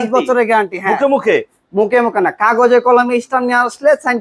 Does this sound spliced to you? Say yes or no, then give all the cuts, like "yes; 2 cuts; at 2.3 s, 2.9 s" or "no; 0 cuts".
no; 0 cuts